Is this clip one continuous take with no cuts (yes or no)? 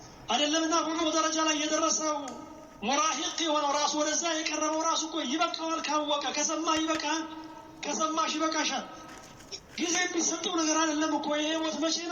yes